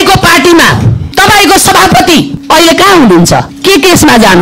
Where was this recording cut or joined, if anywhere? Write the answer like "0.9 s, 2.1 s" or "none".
1.0 s, 2.4 s, 3.5 s